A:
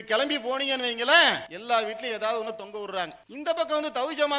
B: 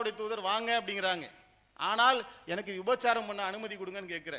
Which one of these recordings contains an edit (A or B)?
A